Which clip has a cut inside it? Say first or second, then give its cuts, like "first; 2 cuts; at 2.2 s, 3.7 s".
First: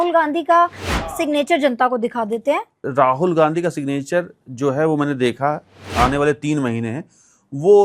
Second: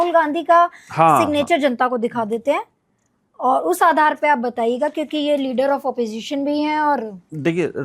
first; 2 cuts; at 2.8 s, 5.8 s